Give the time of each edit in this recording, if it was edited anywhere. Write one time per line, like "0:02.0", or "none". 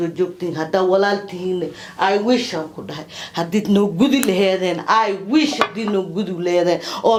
none

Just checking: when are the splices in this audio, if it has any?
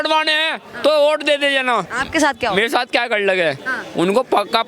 0:02.0

